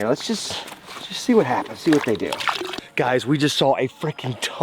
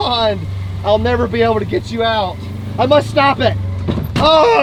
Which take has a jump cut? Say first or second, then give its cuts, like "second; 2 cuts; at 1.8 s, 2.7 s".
first; 1 cut; at 2.7 s